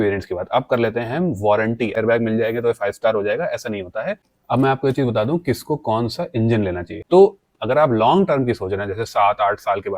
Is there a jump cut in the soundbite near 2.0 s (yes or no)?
yes